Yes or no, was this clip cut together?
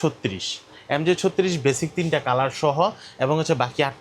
no